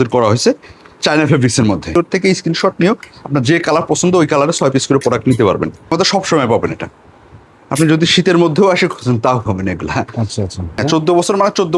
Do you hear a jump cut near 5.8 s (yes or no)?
yes